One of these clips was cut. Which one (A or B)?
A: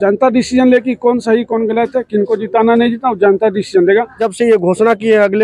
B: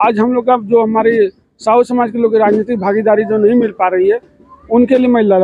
A